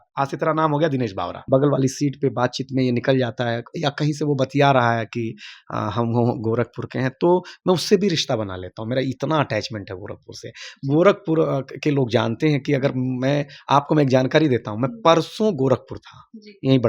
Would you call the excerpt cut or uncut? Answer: cut